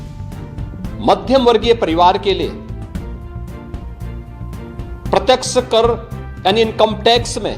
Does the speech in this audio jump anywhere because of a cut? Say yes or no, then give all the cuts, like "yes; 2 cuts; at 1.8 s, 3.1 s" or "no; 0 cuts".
yes; 1 cut; at 1.0 s